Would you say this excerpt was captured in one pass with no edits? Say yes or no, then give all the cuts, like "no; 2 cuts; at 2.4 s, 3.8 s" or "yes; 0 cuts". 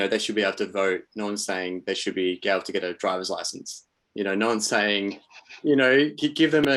yes; 0 cuts